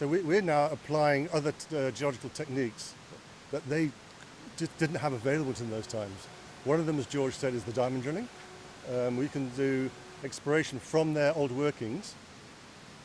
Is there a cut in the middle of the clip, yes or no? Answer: no